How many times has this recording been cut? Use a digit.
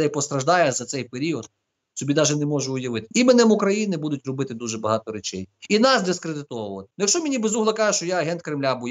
2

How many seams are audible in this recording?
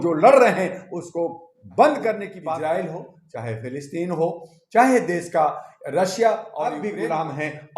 2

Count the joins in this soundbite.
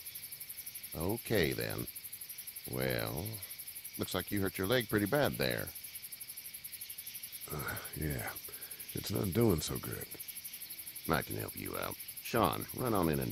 1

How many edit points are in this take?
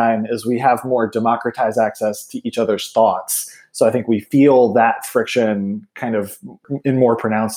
1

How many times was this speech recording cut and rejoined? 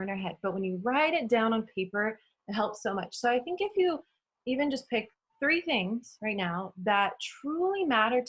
0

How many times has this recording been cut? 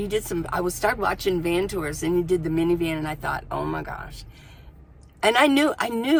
0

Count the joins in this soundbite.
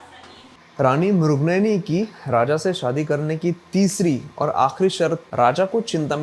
1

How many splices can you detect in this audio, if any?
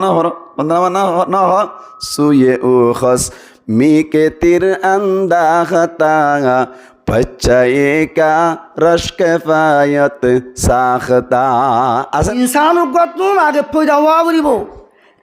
1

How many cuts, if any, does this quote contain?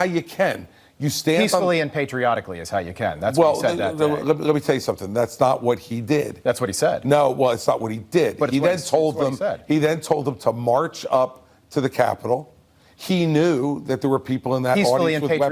0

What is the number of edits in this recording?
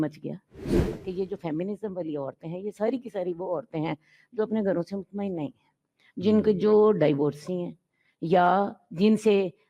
1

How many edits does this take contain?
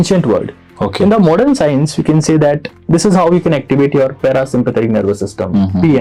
0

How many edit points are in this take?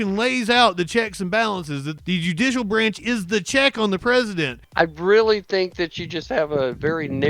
2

